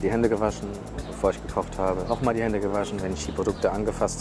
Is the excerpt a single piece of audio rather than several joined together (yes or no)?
no